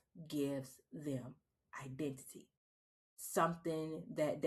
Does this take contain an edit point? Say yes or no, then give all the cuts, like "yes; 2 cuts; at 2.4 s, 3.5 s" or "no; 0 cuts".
no; 0 cuts